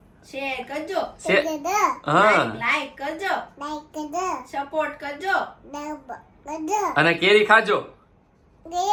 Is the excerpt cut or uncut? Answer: uncut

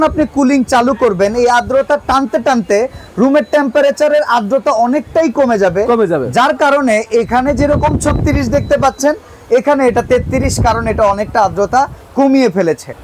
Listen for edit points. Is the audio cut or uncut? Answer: uncut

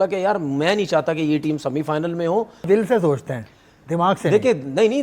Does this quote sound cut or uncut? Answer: cut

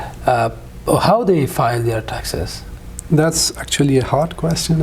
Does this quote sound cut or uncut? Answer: uncut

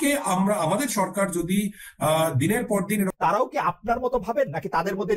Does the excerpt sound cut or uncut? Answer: cut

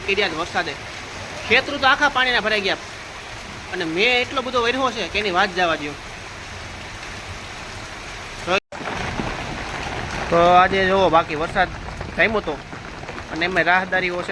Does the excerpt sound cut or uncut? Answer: cut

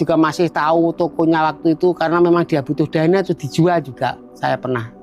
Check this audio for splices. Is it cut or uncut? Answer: uncut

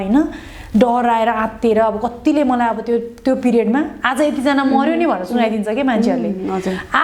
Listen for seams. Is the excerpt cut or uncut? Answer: uncut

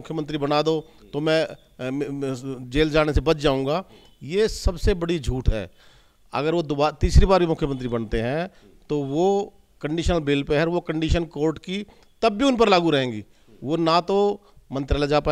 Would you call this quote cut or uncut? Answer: uncut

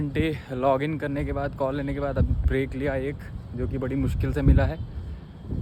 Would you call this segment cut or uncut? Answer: uncut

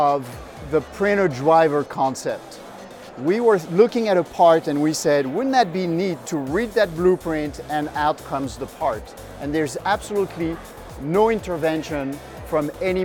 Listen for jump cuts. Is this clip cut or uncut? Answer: cut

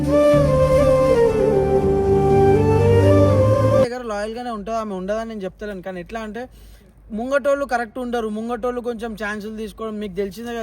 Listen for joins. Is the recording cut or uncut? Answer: cut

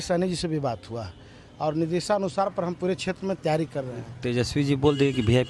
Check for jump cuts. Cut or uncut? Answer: uncut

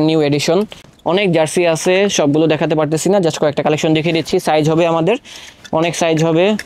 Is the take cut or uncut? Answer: uncut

